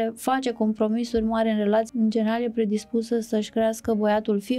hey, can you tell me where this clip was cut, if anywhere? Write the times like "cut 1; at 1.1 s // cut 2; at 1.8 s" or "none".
cut 1; at 1.9 s